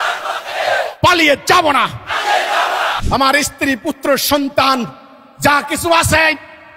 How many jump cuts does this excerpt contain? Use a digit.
1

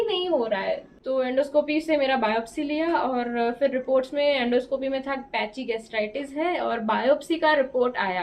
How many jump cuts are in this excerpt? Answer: 1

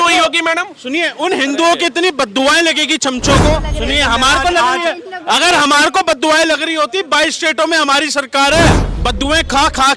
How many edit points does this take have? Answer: 2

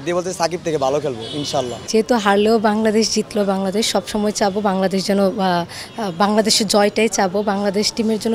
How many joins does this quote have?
0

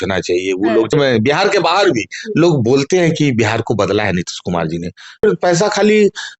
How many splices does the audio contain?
2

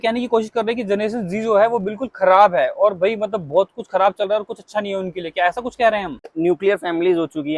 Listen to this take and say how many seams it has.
1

